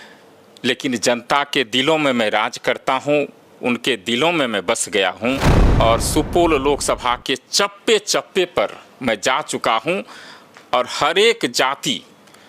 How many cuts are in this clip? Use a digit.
1